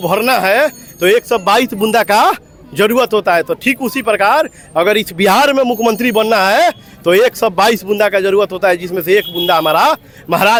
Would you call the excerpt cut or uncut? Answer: uncut